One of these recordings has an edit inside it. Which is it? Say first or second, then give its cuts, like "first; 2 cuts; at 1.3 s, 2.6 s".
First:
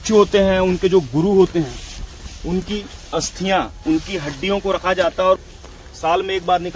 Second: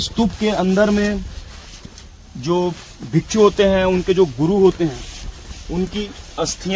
first; 1 cut; at 5.4 s